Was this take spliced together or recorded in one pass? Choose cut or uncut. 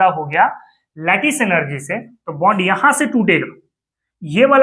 uncut